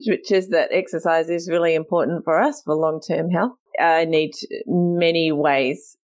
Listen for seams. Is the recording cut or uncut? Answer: cut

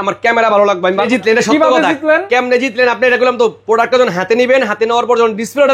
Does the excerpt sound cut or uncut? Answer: cut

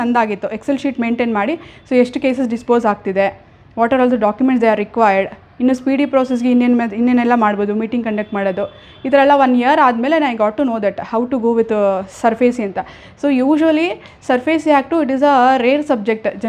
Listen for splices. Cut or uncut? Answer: uncut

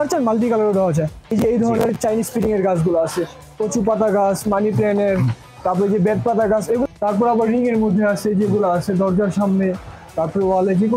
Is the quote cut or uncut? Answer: cut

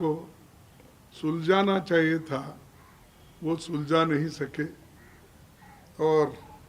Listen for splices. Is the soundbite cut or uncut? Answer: uncut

